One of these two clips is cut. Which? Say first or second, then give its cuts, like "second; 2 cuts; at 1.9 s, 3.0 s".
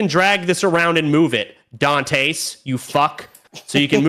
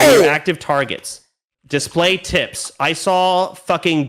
second; 1 cut; at 1.3 s